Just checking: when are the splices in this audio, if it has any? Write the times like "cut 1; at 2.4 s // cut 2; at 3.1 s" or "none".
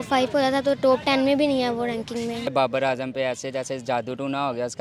cut 1; at 2.5 s